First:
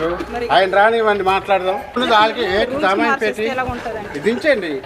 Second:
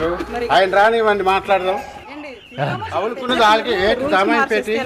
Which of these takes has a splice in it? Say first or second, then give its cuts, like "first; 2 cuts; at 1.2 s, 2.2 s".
first; 1 cut; at 1.9 s